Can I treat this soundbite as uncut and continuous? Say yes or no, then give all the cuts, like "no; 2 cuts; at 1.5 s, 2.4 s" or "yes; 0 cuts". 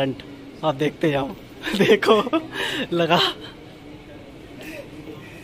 yes; 0 cuts